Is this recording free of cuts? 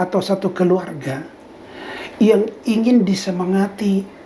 yes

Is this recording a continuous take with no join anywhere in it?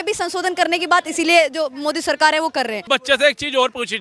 no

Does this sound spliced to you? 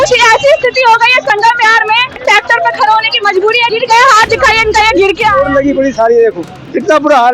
yes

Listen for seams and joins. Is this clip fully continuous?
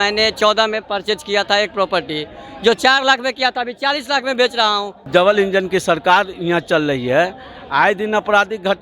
no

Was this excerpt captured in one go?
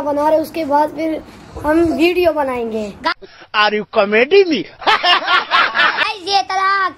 yes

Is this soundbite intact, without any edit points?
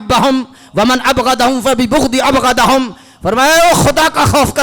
yes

